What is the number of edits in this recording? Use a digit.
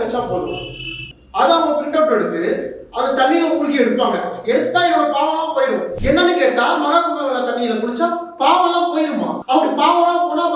1